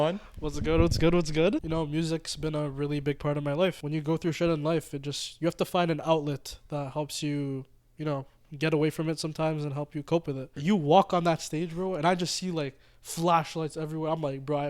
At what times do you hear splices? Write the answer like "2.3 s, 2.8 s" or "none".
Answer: 1.6 s, 3.8 s, 10.5 s